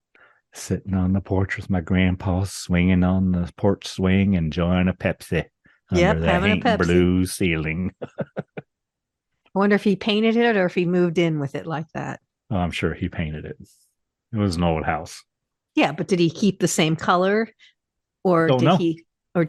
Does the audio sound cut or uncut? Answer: uncut